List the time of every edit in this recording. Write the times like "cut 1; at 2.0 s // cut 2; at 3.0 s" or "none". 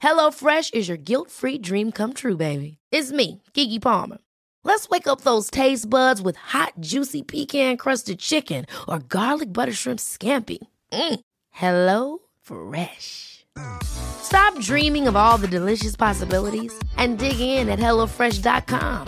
none